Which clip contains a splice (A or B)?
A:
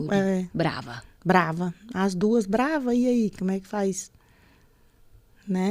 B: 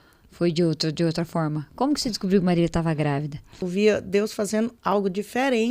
B